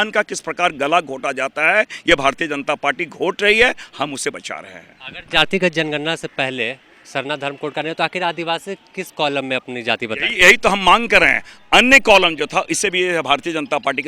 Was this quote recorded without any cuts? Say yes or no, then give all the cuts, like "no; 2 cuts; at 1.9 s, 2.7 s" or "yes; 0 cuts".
yes; 0 cuts